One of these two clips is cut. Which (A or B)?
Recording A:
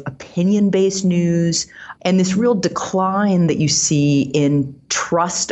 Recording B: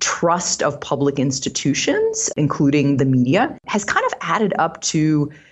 A